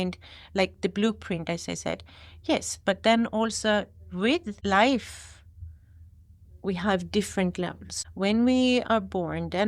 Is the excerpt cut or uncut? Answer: uncut